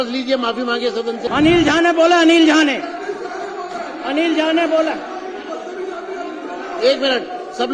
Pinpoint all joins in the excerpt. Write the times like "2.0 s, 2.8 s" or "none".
1.2 s